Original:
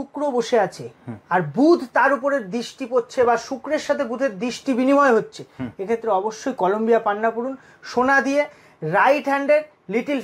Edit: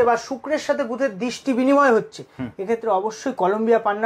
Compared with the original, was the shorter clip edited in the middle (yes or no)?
no